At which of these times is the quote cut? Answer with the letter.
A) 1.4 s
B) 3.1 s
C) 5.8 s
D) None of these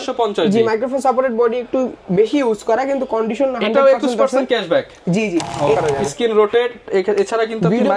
C